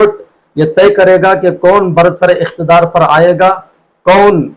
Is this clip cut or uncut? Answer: uncut